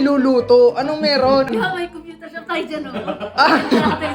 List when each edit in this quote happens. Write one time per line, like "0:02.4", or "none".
0:01.5